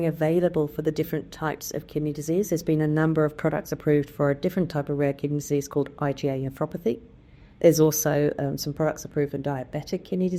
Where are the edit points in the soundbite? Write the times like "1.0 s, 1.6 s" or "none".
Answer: none